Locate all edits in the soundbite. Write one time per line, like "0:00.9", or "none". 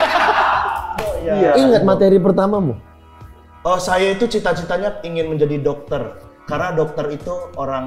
0:01.2